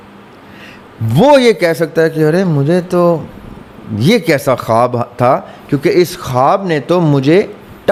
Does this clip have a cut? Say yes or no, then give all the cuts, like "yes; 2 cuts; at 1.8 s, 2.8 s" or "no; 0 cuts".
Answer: no; 0 cuts